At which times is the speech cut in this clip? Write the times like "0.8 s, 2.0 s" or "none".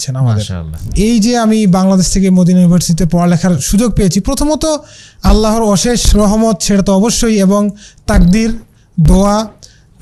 0.9 s

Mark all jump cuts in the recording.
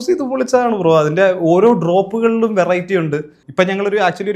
3.4 s

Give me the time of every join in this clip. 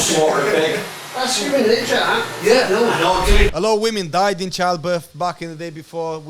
3.5 s

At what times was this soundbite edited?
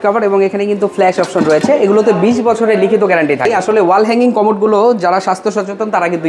3.6 s

